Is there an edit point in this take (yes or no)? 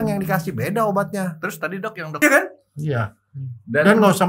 yes